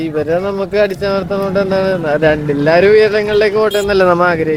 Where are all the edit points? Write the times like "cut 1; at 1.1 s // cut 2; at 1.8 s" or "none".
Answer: none